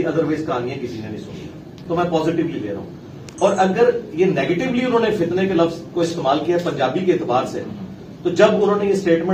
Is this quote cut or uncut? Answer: uncut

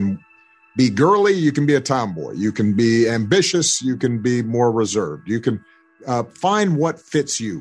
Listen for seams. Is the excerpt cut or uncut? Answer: uncut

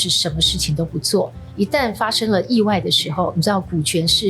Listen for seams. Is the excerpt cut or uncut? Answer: cut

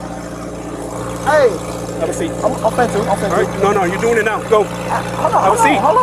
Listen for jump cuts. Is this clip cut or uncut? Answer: uncut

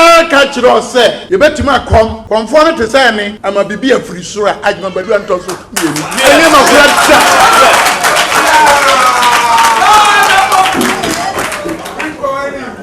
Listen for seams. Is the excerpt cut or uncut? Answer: cut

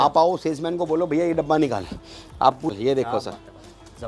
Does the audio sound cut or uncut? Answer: cut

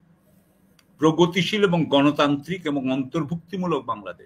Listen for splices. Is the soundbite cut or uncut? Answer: uncut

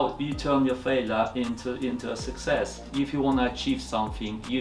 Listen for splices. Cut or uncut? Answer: cut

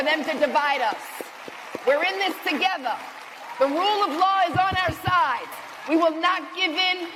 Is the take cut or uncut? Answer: uncut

